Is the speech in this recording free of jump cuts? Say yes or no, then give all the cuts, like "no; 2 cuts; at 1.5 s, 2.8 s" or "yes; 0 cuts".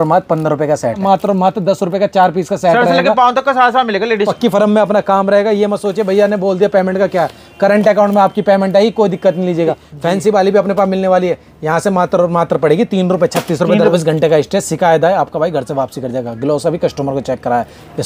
no; 4 cuts; at 1.0 s, 4.3 s, 9.9 s, 13.9 s